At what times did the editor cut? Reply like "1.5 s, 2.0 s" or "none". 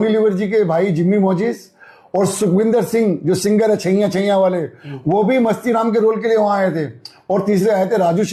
none